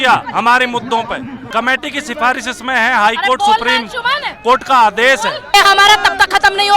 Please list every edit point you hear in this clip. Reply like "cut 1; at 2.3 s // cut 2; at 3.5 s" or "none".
cut 1; at 1.3 s // cut 2; at 5.5 s